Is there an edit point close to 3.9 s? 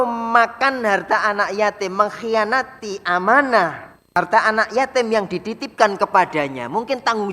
yes; 1 cut; at 3.9 s

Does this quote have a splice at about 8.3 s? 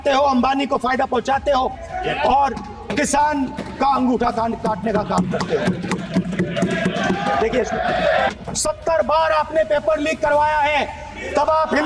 yes; 1 cut; at 8.3 s

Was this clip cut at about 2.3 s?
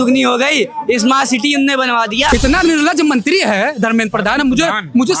yes; 1 cut; at 2.3 s

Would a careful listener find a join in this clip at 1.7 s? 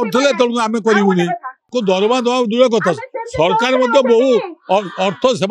yes; 1 cut; at 1.7 s

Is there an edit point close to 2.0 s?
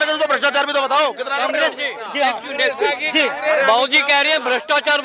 no; 0 cuts

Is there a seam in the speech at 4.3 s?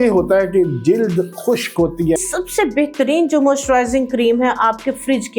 no; 1 cut; at 2.2 s

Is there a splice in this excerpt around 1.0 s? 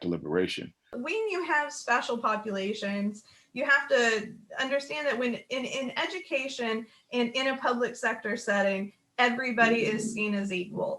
yes; 1 cut; at 1.0 s

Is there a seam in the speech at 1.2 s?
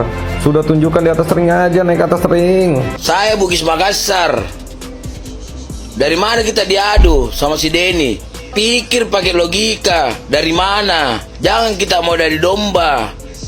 no; 3 cuts; at 3.0 s, 8.3 s, 11.3 s

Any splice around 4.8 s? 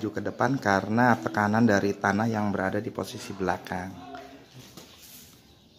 yes; 1 cut; at 4.8 s

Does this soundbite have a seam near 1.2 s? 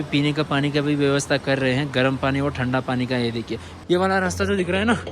no; 1 cut; at 3.7 s

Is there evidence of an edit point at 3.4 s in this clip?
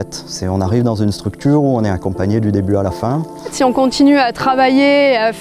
yes; 1 cut; at 3.4 s

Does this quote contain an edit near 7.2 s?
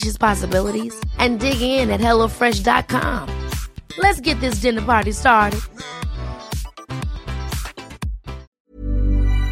no; 1 cut; at 8.5 s

